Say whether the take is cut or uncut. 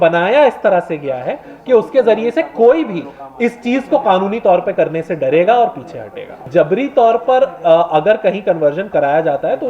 cut